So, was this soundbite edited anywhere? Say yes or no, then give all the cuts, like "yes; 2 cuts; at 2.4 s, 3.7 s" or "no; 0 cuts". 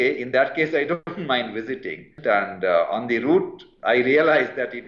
yes; 2 cuts; at 1.1 s, 2.1 s